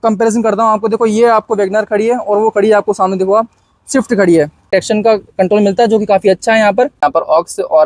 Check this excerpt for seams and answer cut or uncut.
cut